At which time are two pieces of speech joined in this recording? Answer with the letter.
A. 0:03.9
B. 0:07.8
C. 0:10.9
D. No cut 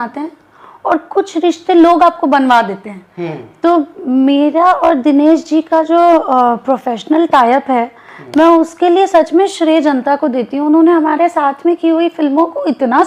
D